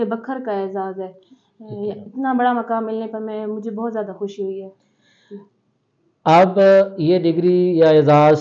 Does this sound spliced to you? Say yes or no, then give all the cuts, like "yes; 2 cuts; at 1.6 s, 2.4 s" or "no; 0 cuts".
no; 0 cuts